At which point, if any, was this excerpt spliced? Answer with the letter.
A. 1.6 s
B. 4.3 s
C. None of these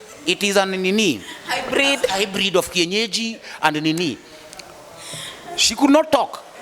C